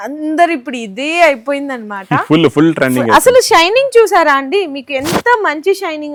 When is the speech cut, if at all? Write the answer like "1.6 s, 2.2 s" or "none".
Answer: none

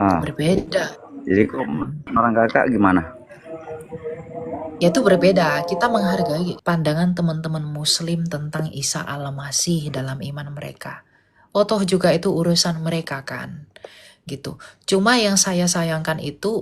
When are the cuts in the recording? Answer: 6.6 s

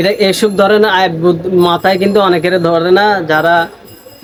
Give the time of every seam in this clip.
none

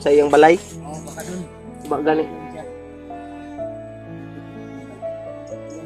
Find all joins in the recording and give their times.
2.3 s

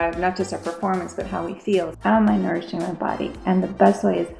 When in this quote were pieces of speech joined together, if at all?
1.9 s

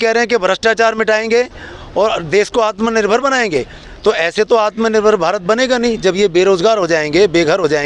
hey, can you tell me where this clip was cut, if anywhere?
3.8 s

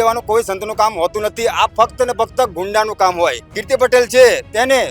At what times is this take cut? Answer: 3.5 s

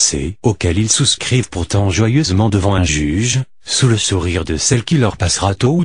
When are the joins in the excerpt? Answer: 1.9 s

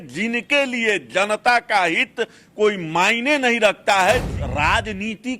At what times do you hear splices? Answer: 4.3 s

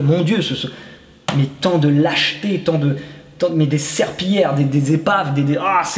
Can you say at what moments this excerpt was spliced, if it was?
none

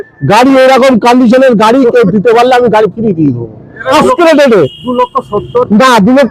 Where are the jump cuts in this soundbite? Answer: 3.9 s

